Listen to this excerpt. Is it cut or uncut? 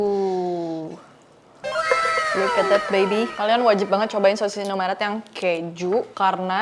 cut